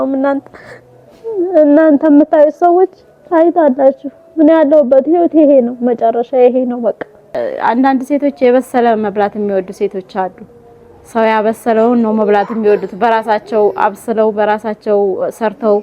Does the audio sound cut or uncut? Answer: cut